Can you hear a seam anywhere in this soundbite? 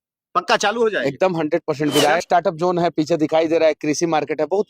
yes; 1 cut; at 2.2 s

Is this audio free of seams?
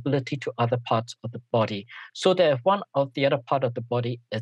yes; 0 cuts

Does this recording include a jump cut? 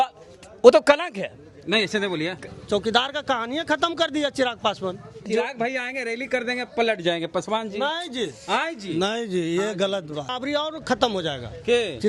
yes; 3 cuts; at 2.5 s, 5.2 s, 10.3 s

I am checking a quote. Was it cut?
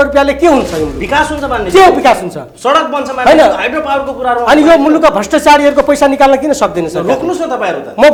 no; 0 cuts

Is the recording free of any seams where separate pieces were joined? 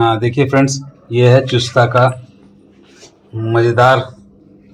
yes; 0 cuts

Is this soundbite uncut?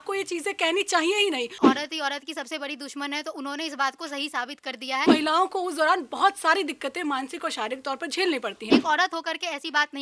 no; 3 cuts; at 1.5 s, 5.1 s, 8.8 s

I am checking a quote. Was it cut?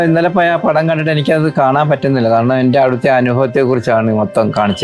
no; 0 cuts

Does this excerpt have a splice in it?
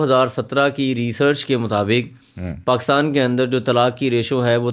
no; 0 cuts

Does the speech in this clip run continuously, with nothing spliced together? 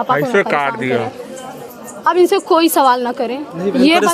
yes; 0 cuts

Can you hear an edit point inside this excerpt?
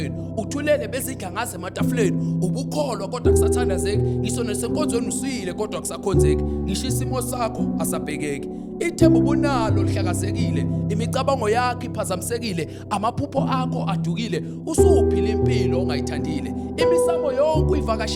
no; 0 cuts

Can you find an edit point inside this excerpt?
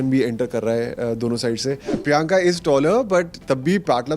yes; 1 cut; at 2.0 s

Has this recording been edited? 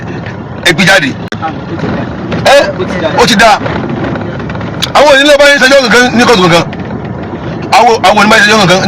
no; 0 cuts

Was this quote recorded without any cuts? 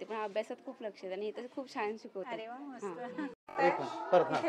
yes; 0 cuts

